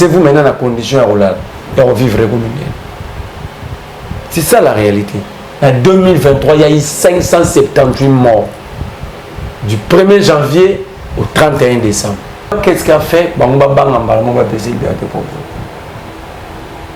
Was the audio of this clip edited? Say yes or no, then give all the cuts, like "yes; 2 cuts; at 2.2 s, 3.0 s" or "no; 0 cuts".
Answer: yes; 2 cuts; at 5.4 s, 12.5 s